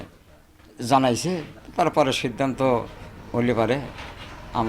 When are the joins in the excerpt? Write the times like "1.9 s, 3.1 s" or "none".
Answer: 1.6 s